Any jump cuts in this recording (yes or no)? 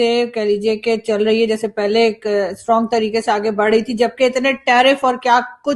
no